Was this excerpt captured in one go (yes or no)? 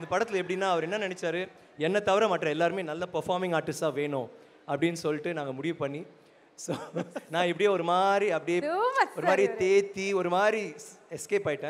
yes